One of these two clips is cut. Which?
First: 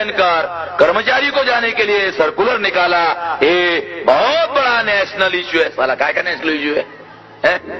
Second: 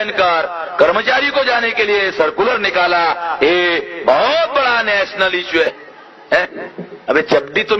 second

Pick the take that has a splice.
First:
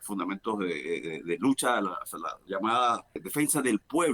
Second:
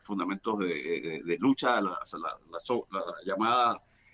first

